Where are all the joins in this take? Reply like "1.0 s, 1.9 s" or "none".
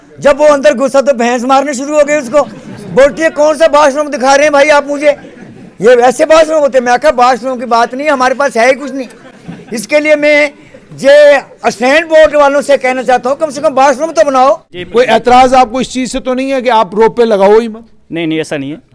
14.7 s